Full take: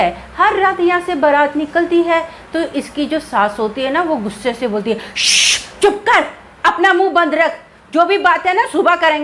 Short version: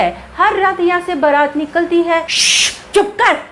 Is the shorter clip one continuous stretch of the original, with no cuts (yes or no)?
no